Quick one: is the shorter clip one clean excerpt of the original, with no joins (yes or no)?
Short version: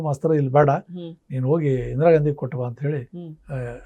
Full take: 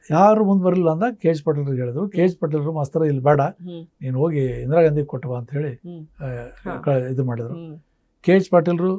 yes